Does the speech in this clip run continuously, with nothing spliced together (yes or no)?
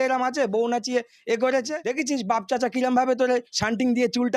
no